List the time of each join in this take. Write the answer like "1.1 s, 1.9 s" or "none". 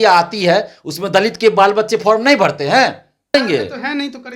3.3 s